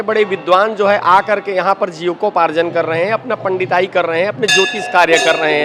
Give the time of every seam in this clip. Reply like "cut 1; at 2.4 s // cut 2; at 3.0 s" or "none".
none